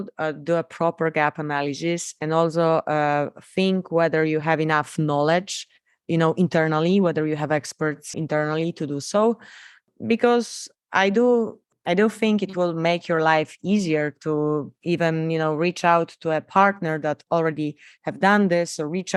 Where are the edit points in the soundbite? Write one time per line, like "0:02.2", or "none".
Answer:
none